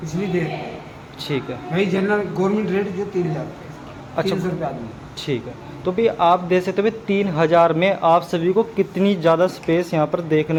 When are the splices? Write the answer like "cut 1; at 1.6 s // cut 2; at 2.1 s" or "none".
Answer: none